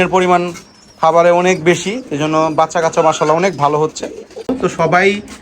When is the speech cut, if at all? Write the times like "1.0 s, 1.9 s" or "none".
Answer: 4.5 s